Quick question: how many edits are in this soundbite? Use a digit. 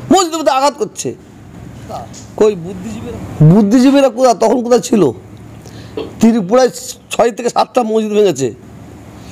1